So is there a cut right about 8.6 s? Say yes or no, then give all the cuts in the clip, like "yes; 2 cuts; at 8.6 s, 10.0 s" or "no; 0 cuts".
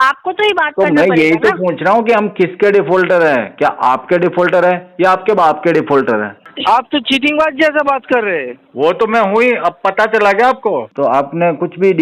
no; 2 cuts; at 6.4 s, 10.9 s